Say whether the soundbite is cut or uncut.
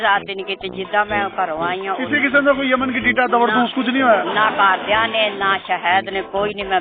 uncut